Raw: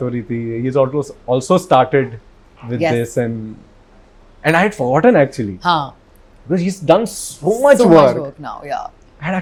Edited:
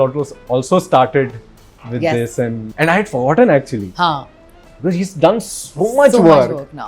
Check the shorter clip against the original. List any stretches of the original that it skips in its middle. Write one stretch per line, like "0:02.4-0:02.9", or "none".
0:03.4-0:04.3